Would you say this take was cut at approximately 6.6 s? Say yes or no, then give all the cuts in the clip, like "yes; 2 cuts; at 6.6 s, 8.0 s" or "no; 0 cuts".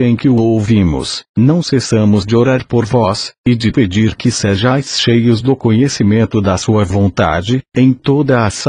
yes; 1 cut; at 6.6 s